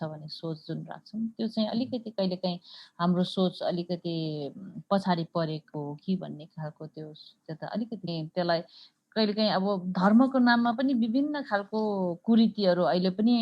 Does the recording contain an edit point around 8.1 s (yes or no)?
yes